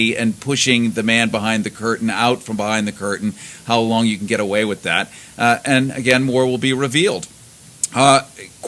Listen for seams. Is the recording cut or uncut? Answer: cut